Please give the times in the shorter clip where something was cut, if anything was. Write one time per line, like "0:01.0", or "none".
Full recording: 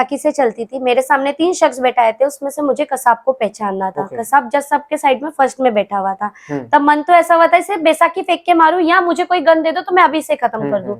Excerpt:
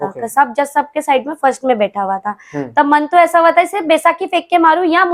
none